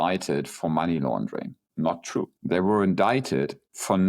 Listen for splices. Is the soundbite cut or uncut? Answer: cut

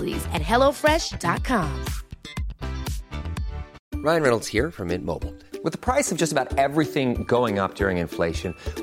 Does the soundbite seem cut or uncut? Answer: cut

